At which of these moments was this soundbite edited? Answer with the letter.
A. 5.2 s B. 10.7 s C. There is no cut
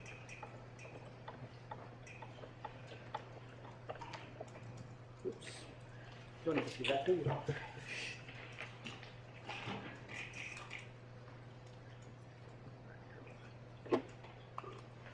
B